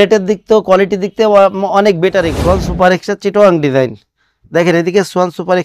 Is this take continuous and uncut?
no; 1 cut; at 2.3 s

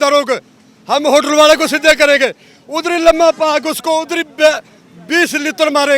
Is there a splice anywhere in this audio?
no; 0 cuts

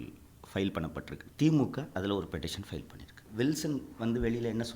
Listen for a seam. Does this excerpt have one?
yes; 2 cuts; at 1.2 s, 3.2 s

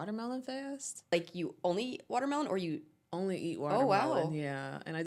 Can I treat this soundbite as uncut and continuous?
no; 1 cut; at 1.1 s

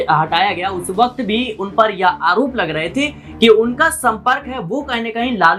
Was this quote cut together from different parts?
no; 0 cuts

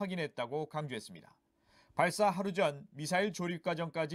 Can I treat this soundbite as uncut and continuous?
no; 1 cut; at 2.5 s

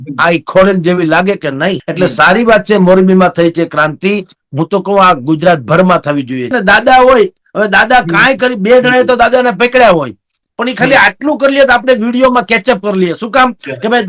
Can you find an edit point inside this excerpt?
yes; 2 cuts; at 1.9 s, 6.5 s

